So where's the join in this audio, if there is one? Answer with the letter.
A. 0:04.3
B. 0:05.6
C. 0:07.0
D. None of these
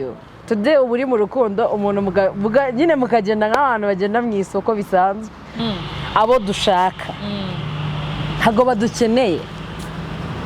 B